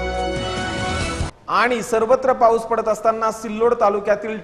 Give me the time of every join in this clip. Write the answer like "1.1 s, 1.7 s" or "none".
1.3 s